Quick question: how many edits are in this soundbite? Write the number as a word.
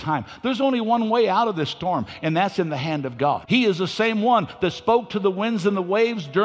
one